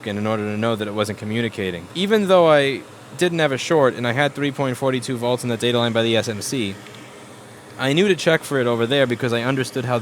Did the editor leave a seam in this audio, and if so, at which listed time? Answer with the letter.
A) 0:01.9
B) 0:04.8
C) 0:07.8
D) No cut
A